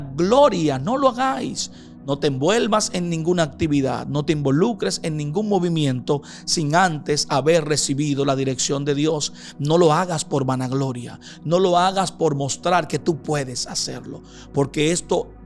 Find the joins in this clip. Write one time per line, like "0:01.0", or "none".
none